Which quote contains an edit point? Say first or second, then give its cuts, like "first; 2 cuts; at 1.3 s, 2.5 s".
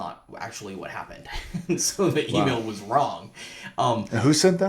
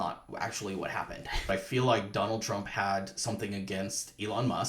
second; 1 cut; at 1.5 s